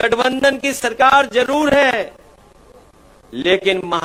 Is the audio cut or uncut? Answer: uncut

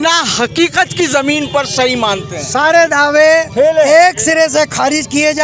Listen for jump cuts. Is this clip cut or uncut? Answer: uncut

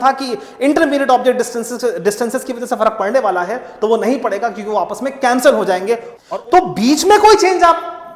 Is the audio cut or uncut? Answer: cut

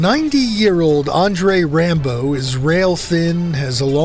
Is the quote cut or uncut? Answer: uncut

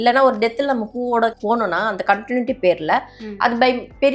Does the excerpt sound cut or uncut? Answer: cut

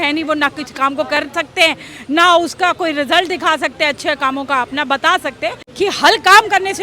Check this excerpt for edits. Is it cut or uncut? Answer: cut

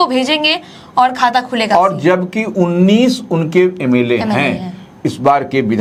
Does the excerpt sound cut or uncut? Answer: uncut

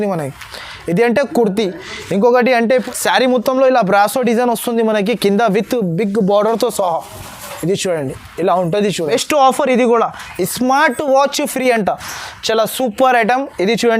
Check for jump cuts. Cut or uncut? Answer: cut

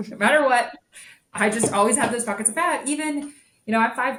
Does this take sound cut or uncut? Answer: uncut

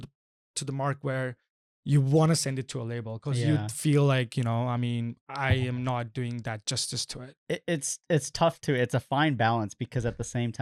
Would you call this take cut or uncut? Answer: uncut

